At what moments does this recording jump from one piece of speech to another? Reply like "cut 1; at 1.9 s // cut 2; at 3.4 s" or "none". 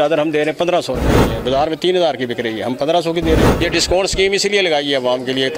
cut 1; at 1.3 s // cut 2; at 3.5 s